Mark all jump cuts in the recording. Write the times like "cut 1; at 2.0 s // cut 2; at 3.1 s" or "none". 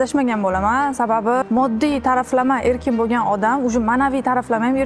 cut 1; at 1.5 s